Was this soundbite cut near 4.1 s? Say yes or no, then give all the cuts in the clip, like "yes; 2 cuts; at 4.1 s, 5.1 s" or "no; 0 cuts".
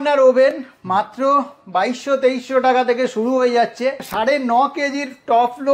yes; 1 cut; at 4.1 s